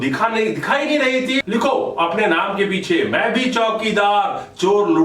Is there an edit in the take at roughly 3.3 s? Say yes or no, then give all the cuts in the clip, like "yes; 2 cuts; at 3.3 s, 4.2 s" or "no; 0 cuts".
no; 1 cut; at 1.4 s